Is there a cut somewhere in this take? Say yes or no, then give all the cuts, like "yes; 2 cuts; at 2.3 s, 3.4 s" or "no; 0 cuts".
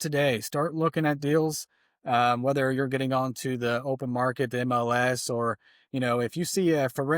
no; 0 cuts